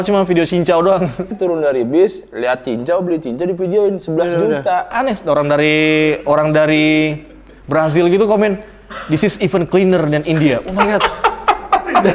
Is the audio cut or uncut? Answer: cut